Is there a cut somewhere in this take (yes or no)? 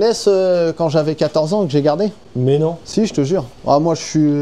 no